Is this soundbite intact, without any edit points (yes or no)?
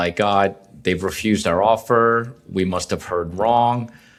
yes